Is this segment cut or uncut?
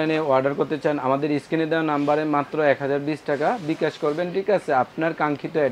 uncut